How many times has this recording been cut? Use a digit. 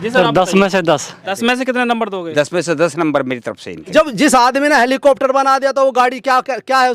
2